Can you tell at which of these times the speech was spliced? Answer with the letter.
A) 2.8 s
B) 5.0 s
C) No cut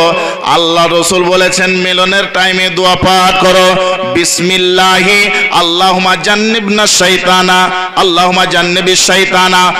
C